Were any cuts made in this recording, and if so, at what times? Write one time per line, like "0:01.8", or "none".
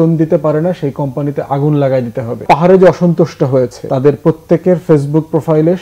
0:02.4
0:03.8